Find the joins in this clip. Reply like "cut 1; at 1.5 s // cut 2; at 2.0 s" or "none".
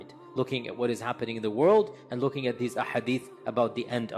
none